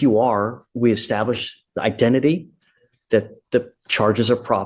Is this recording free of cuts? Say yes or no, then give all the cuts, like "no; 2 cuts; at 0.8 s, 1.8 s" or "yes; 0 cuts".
yes; 0 cuts